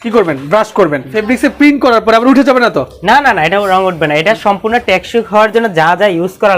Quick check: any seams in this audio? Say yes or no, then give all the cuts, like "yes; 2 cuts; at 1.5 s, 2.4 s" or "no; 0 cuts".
yes; 1 cut; at 1.2 s